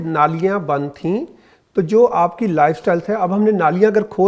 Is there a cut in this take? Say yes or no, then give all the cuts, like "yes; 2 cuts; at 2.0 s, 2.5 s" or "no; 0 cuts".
no; 0 cuts